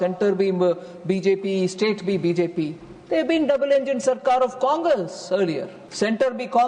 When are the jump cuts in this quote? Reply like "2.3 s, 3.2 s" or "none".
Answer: 5.8 s